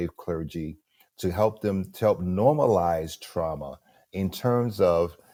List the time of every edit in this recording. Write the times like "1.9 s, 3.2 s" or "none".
none